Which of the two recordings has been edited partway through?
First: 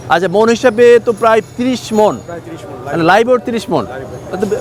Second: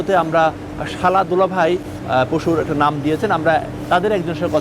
second; 1 cut; at 1.9 s

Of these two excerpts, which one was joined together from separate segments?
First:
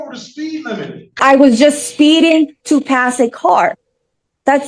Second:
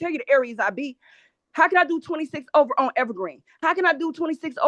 first; 1 cut; at 1.2 s

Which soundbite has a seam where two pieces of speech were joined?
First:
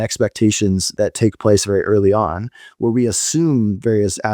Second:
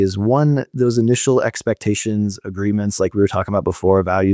first; 1 cut; at 0.9 s

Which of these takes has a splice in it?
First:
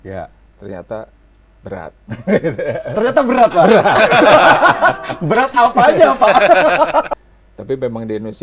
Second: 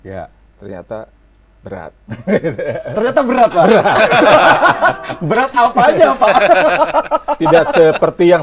first; 1 cut; at 7.1 s

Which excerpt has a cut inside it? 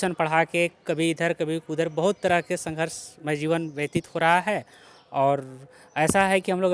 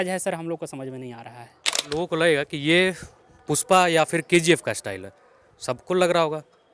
second; 1 cut; at 1.8 s

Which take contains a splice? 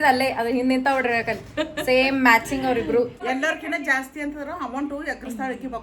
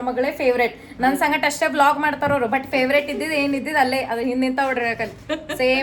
first; 1 cut; at 3.2 s

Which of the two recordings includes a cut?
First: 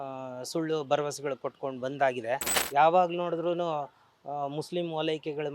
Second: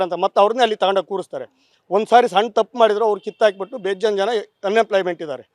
first; 1 cut; at 2.6 s

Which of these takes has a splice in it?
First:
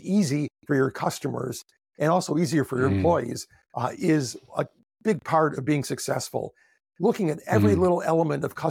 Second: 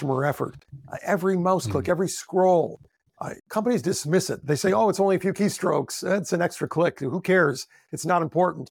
second; 1 cut; at 3.4 s

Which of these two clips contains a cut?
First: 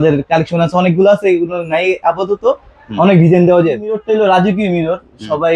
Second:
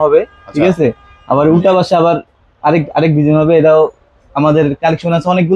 first; 1 cut; at 4.0 s

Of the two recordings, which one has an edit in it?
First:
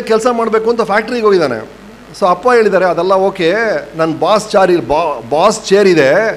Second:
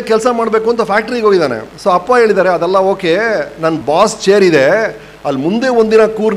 second; 2 cuts; at 1.7 s, 3.8 s

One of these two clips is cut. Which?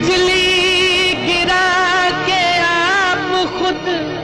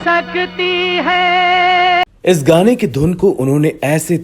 second; 1 cut; at 2.1 s

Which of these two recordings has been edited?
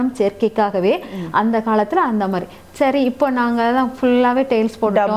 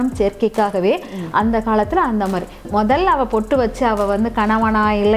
second; 1 cut; at 2.7 s

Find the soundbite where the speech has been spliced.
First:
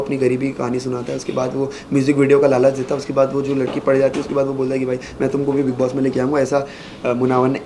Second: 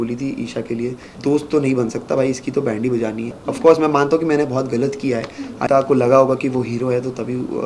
second; 3 cuts; at 1.1 s, 3.3 s, 5.7 s

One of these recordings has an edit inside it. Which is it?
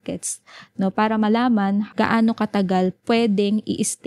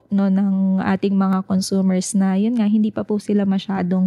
first; 2 cuts; at 1.9 s, 3.0 s

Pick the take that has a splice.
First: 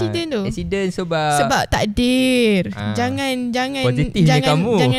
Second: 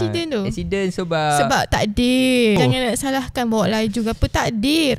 second; 1 cut; at 2.6 s

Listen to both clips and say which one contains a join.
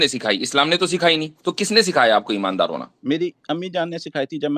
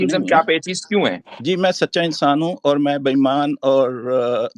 second; 1 cut; at 1.3 s

